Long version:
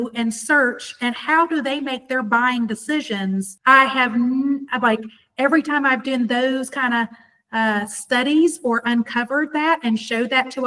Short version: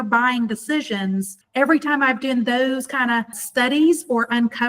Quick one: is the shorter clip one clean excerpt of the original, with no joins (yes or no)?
no